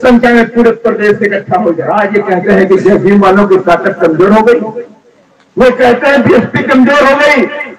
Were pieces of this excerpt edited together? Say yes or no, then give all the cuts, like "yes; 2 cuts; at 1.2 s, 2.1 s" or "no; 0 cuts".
yes; 1 cut; at 1.8 s